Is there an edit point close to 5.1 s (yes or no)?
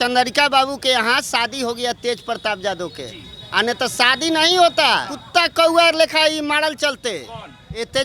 yes